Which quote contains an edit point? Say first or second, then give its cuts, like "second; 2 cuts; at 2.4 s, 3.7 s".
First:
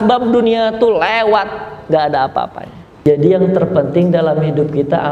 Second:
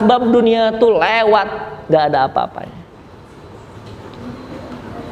first; 1 cut; at 3.0 s